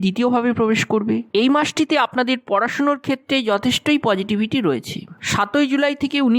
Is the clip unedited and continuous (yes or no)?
no